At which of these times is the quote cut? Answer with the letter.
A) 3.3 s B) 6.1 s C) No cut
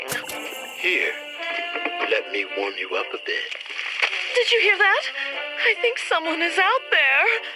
C